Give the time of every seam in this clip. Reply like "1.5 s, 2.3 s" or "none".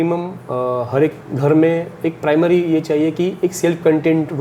1.2 s